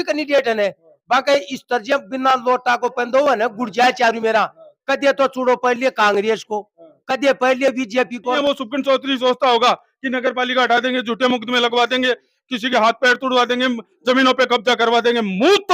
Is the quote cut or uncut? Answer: cut